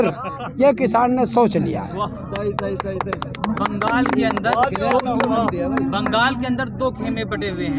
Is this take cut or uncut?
uncut